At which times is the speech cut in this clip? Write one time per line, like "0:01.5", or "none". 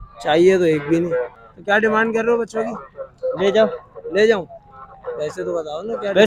0:01.4